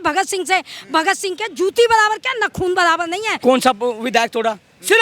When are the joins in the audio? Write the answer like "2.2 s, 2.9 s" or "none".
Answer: 3.3 s